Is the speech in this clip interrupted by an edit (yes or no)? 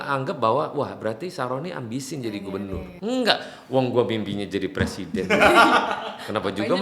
yes